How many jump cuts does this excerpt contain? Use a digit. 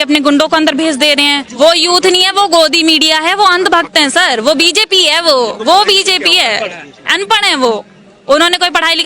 1